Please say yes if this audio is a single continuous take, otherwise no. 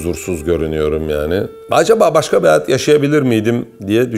yes